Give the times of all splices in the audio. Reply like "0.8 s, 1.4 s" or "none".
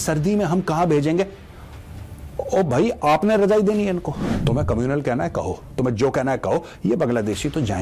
4.3 s